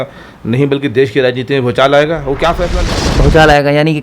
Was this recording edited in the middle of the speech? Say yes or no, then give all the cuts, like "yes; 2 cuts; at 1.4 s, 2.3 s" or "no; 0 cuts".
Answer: yes; 1 cut; at 2.6 s